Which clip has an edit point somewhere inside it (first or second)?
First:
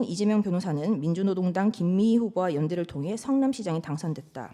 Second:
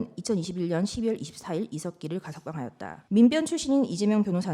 second